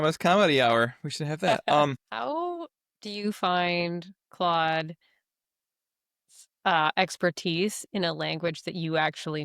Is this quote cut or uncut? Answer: cut